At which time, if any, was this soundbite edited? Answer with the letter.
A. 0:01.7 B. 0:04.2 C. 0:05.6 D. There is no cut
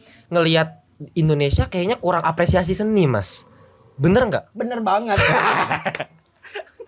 D